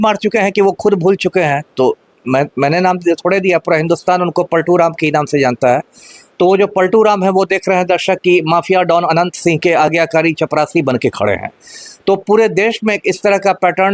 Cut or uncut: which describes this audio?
uncut